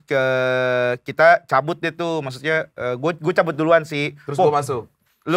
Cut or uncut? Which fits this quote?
uncut